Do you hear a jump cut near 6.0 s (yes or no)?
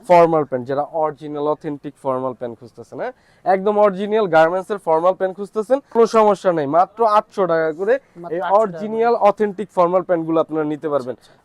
yes